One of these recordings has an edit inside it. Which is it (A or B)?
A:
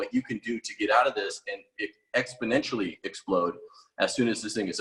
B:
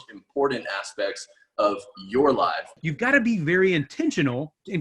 B